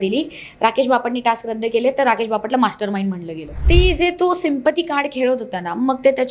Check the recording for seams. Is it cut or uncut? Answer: cut